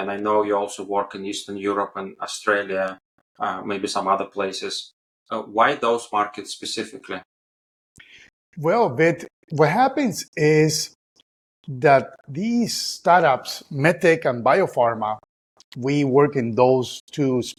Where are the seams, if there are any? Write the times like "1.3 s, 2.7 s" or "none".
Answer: none